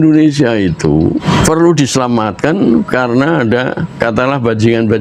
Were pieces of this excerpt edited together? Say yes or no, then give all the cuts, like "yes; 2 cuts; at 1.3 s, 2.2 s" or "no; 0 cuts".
yes; 2 cuts; at 1.2 s, 4.0 s